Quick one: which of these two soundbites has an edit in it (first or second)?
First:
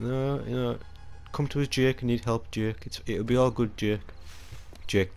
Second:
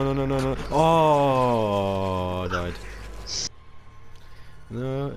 second